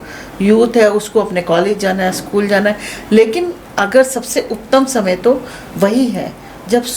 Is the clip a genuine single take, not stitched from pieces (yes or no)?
yes